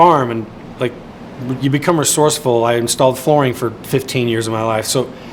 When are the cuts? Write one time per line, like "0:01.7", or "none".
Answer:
none